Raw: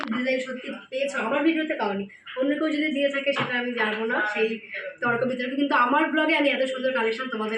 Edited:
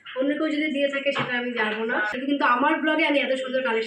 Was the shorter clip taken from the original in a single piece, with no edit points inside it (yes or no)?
no